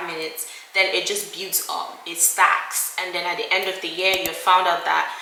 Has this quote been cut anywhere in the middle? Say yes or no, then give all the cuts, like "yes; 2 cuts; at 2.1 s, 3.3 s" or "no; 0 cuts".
no; 0 cuts